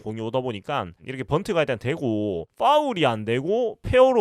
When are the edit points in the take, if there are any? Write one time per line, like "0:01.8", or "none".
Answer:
0:01.0